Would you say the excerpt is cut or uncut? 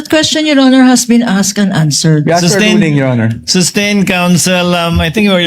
uncut